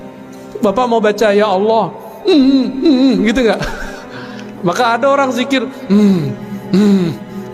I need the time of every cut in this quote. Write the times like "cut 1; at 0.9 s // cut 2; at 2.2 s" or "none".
none